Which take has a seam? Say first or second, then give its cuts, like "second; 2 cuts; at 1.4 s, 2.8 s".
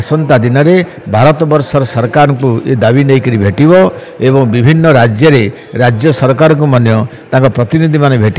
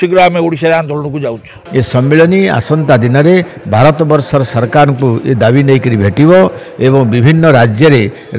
second; 1 cut; at 1.6 s